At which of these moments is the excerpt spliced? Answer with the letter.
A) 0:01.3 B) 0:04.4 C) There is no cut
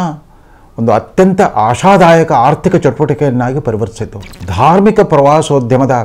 B